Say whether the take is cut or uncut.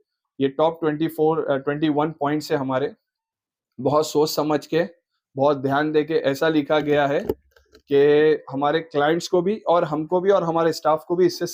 uncut